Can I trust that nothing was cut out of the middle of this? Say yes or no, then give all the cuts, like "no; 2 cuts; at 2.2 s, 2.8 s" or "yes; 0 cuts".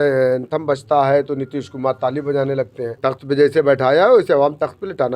no; 1 cut; at 2.8 s